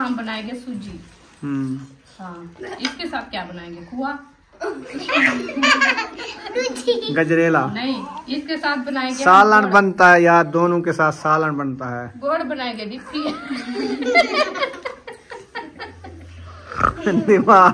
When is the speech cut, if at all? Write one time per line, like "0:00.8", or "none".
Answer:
none